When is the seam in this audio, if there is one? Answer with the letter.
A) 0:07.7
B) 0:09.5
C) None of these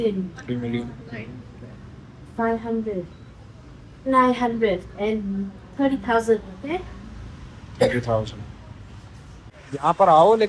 B